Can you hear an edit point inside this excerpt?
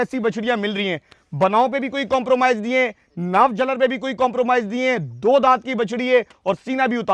no; 0 cuts

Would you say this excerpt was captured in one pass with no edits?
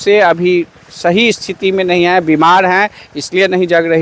yes; 0 cuts

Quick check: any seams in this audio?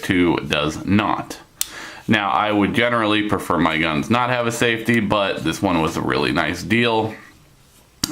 yes; 1 cut; at 2.3 s

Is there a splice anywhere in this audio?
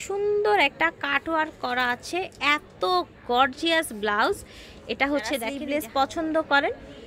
yes; 1 cut; at 5.6 s

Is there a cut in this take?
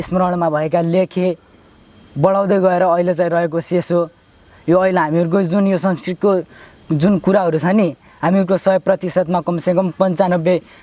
no; 0 cuts

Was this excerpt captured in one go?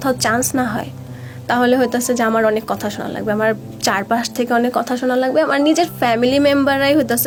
yes; 0 cuts

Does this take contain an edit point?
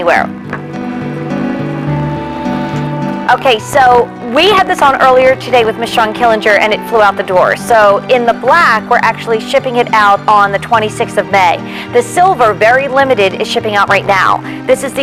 no; 0 cuts

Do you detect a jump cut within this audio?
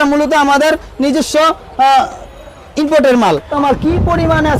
yes; 1 cut; at 3.5 s

